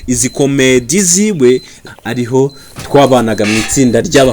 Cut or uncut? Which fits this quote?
cut